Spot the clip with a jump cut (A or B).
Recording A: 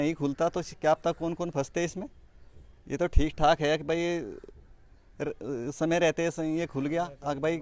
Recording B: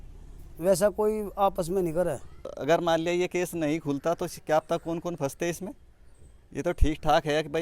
B